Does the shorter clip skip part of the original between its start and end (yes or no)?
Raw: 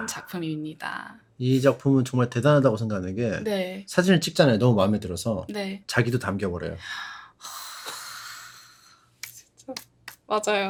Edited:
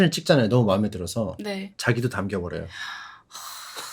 no